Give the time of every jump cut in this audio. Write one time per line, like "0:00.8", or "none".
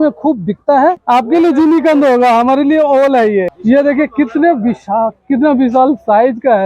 0:01.0
0:03.5